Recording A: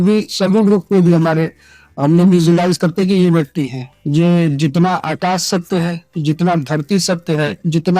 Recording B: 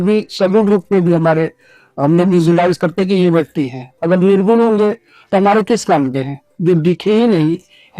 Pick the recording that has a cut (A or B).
A